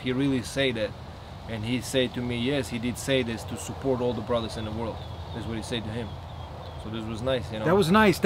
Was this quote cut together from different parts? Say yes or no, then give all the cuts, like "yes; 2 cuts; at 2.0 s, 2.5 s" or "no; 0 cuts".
no; 0 cuts